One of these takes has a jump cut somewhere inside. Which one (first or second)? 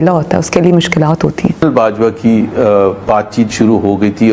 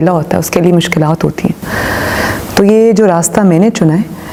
first